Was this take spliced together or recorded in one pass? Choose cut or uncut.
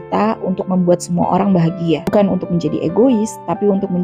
cut